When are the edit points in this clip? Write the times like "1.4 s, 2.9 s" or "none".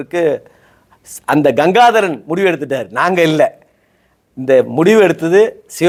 none